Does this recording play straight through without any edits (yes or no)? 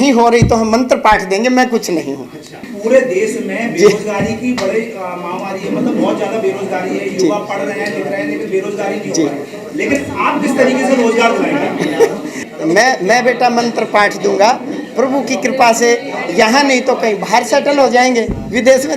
no